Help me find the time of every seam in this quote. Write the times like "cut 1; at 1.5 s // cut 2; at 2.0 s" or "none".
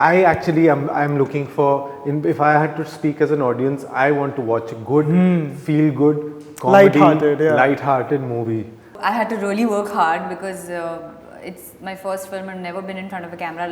cut 1; at 8.9 s